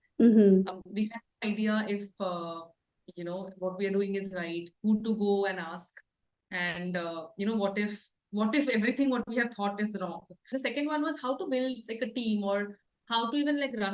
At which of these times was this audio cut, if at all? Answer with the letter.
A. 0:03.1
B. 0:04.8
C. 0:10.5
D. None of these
C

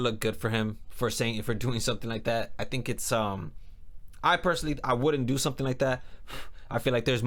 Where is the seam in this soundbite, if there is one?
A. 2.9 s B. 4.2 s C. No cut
C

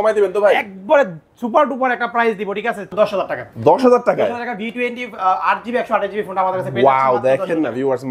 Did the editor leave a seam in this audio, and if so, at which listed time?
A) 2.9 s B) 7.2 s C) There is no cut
A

